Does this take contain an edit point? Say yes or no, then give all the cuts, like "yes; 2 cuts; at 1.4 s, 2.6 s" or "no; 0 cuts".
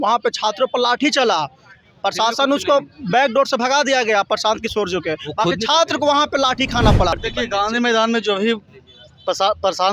yes; 1 cut; at 7.1 s